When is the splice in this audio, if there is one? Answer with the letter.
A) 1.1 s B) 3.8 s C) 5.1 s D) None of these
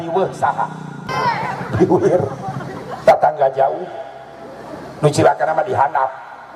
A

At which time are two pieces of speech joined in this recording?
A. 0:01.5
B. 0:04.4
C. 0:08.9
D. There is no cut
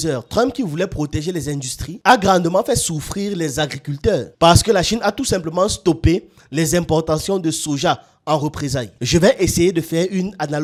D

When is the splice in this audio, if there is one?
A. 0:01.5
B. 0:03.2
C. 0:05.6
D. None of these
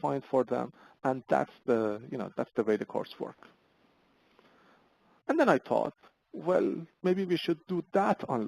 D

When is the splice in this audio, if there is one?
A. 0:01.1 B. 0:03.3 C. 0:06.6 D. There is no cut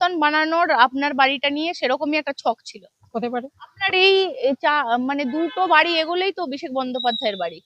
B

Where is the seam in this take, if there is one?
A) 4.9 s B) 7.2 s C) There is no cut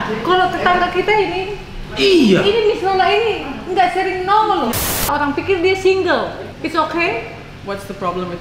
A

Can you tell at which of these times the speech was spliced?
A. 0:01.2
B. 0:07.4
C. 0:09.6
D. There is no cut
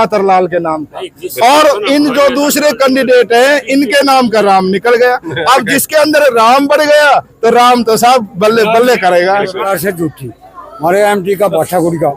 C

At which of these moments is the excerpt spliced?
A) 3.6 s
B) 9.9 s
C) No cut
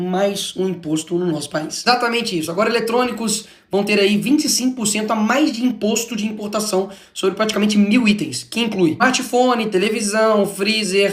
C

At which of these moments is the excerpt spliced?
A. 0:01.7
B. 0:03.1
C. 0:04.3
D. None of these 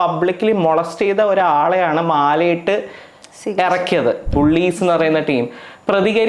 C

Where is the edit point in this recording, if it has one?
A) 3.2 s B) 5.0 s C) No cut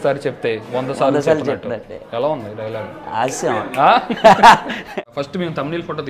B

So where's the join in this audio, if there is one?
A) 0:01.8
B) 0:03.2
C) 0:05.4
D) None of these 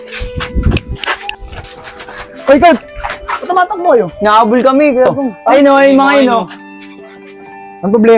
D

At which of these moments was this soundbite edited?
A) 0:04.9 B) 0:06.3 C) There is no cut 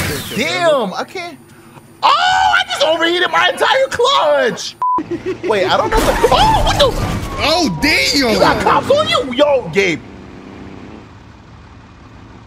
A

